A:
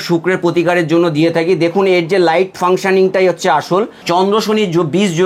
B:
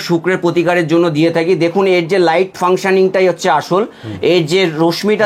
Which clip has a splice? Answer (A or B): A